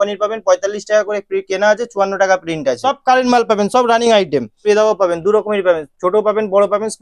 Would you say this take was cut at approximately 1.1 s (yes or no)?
no